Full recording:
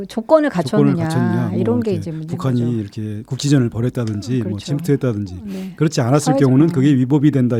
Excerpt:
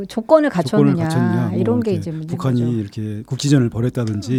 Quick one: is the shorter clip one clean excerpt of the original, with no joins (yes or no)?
yes